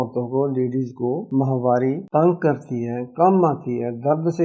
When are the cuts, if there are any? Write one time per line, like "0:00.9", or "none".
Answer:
0:01.2
0:02.0